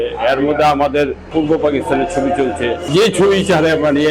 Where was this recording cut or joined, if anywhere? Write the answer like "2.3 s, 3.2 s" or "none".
1.3 s, 2.9 s